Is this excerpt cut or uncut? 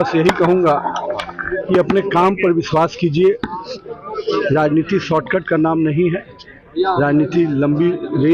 uncut